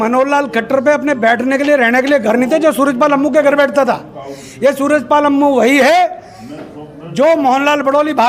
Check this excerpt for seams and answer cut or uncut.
uncut